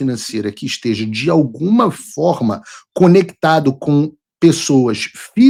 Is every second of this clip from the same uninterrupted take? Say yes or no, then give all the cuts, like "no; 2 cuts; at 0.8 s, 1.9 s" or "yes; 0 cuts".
yes; 0 cuts